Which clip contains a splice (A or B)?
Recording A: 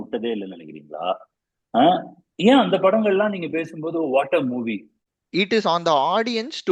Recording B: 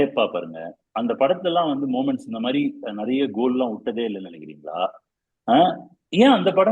A